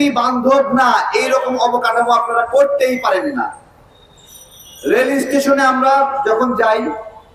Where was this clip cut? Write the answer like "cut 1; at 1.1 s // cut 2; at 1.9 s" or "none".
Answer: none